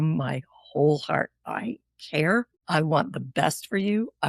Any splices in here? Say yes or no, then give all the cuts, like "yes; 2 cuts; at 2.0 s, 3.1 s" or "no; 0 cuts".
yes; 1 cut; at 2.6 s